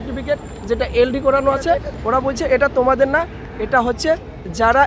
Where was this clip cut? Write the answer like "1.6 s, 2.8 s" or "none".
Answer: 1.9 s

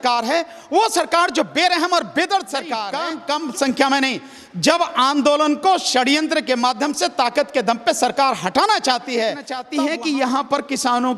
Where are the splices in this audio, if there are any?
2.9 s, 9.5 s

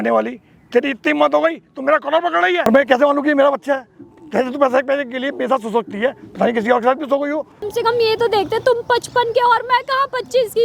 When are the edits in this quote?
2.6 s, 7.7 s

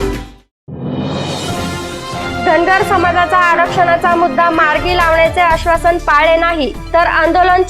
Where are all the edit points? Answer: 1.8 s

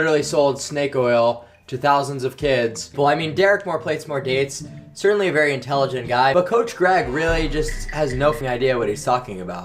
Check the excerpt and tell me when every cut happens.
2.9 s, 8.4 s

